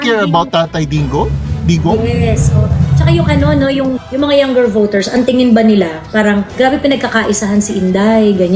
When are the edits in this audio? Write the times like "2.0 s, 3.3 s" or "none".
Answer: 4.0 s, 6.5 s